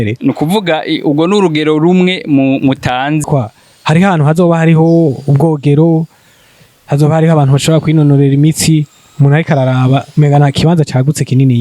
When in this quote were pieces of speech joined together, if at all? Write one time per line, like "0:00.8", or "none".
0:03.2